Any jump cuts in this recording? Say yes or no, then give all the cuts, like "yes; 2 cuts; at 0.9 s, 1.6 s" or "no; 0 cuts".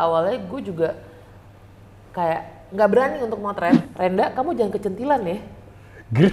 yes; 1 cut; at 3.9 s